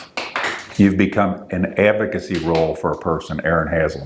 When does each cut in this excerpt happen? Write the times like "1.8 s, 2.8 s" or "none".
none